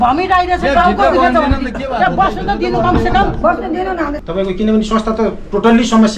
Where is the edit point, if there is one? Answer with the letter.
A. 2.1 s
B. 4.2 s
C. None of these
B